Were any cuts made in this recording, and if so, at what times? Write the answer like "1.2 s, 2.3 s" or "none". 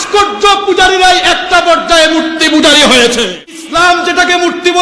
3.5 s